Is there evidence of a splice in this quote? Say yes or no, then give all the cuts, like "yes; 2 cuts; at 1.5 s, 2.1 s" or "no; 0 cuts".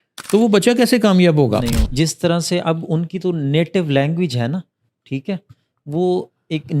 yes; 1 cut; at 1.8 s